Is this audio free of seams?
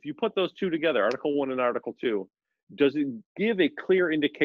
yes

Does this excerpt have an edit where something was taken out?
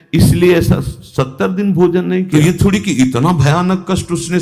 yes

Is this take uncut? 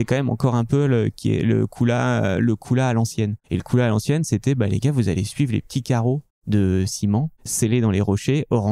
no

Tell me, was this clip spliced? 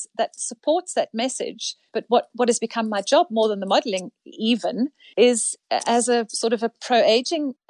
no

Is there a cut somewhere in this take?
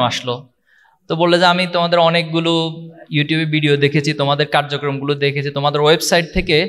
no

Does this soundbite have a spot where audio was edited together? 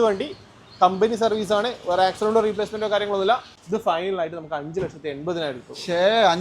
yes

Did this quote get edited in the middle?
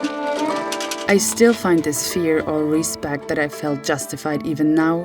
yes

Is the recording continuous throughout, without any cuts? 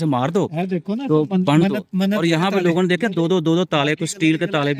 yes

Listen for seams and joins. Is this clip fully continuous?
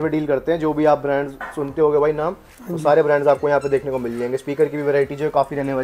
yes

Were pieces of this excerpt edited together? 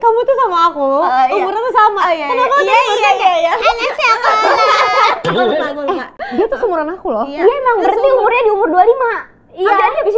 no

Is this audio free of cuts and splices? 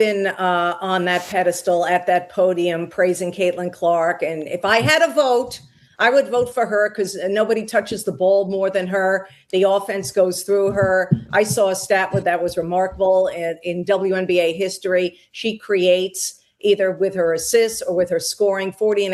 yes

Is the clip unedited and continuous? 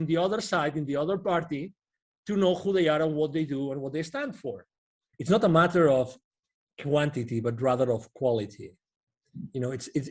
no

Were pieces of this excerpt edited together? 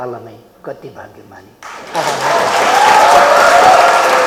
no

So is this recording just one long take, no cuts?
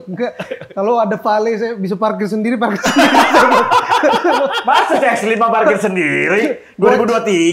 yes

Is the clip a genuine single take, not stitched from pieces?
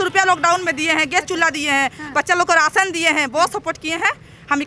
yes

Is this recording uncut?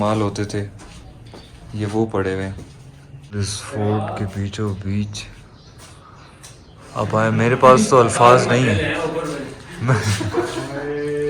no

